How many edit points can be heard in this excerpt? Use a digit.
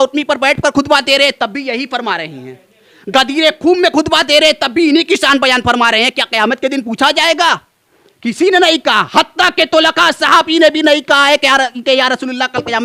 0